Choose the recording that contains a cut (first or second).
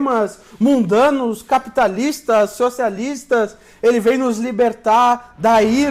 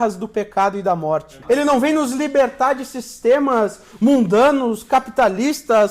second